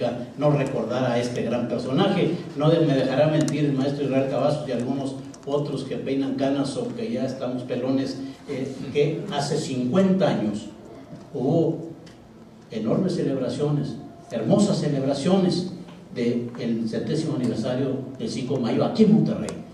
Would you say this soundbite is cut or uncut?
uncut